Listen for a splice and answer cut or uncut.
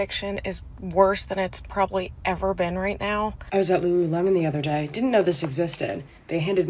cut